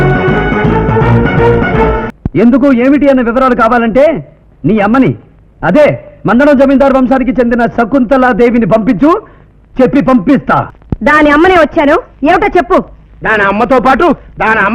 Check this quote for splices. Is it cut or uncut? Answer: cut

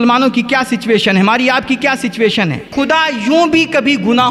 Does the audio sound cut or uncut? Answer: cut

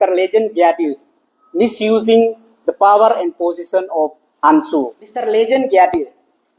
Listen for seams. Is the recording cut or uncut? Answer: cut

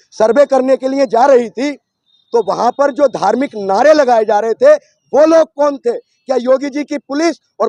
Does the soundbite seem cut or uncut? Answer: uncut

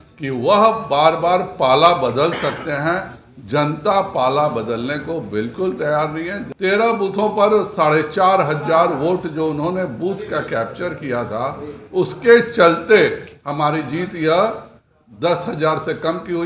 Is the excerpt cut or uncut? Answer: cut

